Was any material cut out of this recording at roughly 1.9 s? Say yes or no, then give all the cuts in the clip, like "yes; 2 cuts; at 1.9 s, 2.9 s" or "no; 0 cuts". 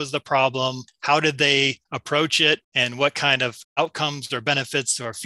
yes; 4 cuts; at 0.9 s, 1.9 s, 2.7 s, 3.6 s